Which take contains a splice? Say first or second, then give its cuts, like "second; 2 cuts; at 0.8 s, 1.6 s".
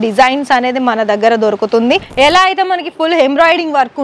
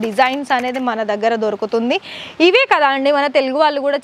first; 1 cut; at 2.1 s